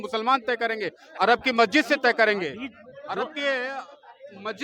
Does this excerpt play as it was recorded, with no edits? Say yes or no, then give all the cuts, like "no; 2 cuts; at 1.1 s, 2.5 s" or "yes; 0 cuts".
yes; 0 cuts